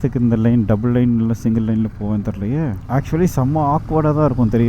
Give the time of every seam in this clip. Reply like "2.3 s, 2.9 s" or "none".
2.8 s